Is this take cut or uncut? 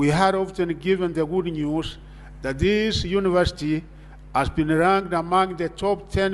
uncut